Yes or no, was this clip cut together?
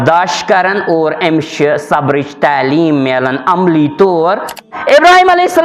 yes